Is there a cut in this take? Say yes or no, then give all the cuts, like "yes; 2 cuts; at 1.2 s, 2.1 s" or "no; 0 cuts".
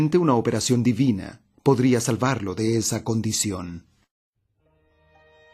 yes; 1 cut; at 2.5 s